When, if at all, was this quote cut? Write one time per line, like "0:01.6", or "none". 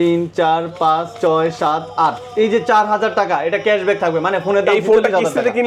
none